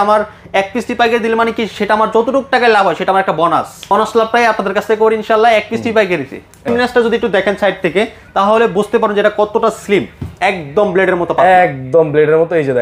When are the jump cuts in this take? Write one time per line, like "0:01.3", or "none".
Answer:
0:03.9
0:06.7